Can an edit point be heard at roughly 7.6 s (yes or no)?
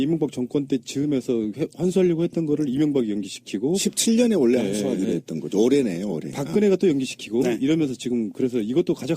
yes